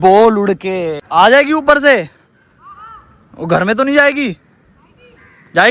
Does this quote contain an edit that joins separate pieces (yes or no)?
yes